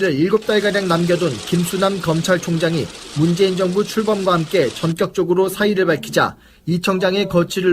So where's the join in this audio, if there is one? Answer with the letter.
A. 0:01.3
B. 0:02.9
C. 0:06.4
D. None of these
C